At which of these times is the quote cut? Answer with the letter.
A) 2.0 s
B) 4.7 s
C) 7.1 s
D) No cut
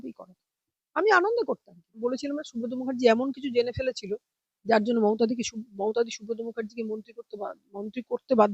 A